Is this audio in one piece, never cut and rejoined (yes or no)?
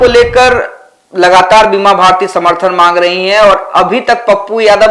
yes